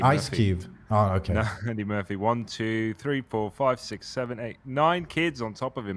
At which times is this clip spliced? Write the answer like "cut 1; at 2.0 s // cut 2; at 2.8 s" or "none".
none

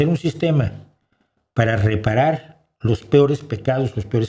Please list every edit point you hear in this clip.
none

